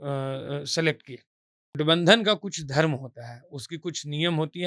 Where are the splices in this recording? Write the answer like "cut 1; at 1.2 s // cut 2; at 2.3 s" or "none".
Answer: cut 1; at 1.8 s